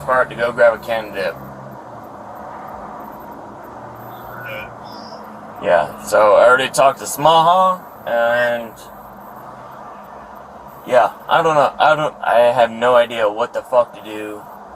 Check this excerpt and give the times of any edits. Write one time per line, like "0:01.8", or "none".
none